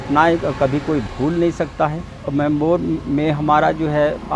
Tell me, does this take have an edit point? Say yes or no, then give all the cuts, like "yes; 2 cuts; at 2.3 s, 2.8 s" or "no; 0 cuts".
yes; 1 cut; at 2.2 s